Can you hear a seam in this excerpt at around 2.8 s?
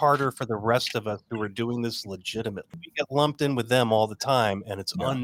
yes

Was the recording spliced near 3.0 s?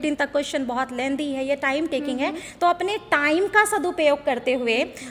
no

